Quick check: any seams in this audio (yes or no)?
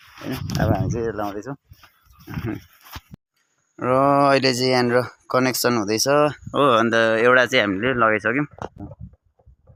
no